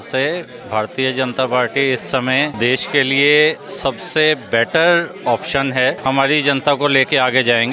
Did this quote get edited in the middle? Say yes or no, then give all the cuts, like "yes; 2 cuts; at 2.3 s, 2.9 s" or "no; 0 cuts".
yes; 2 cuts; at 2.5 s, 6.0 s